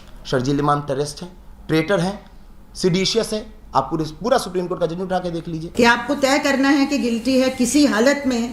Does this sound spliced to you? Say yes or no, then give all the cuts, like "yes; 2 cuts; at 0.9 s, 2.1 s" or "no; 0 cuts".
yes; 1 cut; at 5.6 s